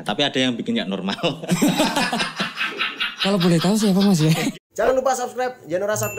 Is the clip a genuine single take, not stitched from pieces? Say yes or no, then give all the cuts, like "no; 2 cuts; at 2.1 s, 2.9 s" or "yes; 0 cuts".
no; 1 cut; at 4.5 s